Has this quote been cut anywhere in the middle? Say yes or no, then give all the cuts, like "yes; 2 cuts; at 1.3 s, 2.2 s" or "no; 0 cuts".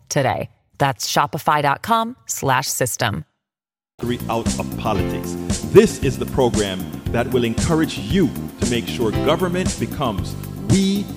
yes; 1 cut; at 4.0 s